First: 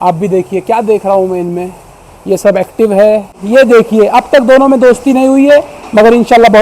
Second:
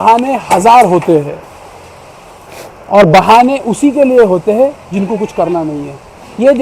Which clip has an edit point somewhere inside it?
first; 1 cut; at 3.4 s

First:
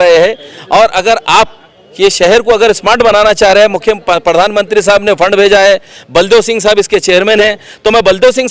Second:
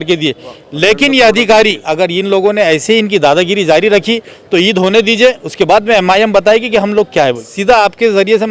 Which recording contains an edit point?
second; 2 cuts; at 1.8 s, 7.5 s

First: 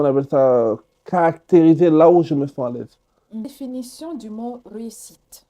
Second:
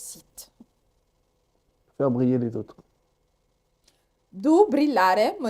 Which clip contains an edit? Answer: first; 1 cut; at 3.5 s

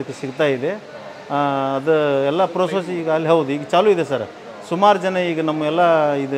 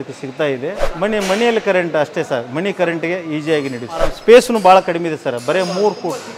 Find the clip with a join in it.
second; 2 cuts; at 0.9 s, 4.1 s

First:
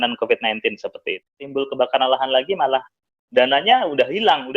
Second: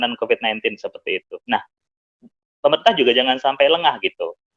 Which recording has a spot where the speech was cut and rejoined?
first; 1 cut; at 1.5 s

